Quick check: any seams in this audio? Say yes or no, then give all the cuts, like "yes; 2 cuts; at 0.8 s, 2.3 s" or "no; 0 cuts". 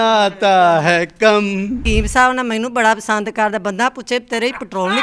yes; 1 cut; at 1.8 s